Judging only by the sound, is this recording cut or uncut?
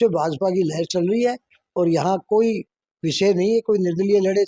uncut